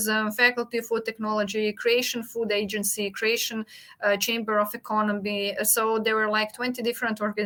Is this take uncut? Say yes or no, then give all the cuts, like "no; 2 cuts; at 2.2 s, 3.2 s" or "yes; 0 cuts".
yes; 0 cuts